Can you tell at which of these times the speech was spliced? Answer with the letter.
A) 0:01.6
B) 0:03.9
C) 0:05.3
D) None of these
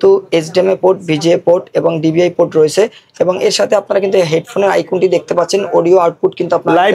D